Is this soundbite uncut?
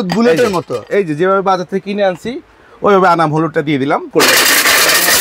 no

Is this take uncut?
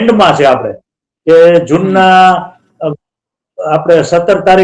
yes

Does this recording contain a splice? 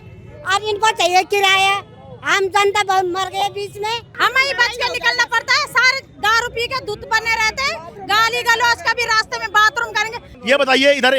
yes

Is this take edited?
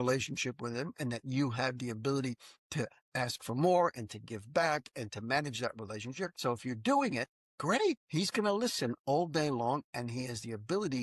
yes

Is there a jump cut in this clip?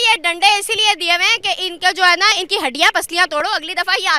no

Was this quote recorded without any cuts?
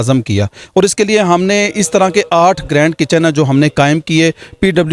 yes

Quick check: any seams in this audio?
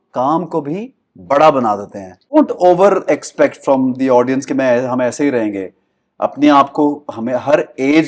yes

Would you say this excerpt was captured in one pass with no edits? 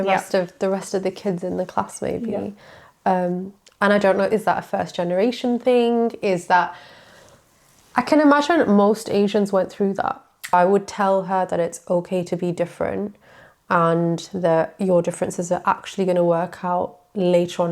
no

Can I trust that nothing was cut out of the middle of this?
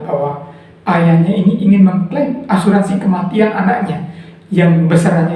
yes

